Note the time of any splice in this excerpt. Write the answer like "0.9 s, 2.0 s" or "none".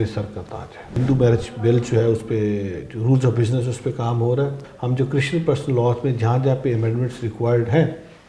1.0 s, 4.6 s